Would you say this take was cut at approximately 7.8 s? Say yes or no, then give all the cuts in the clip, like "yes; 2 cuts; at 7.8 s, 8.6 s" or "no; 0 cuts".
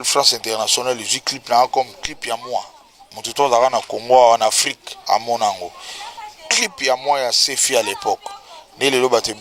no; 0 cuts